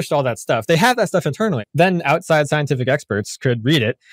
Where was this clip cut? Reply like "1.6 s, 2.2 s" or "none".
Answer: 1.6 s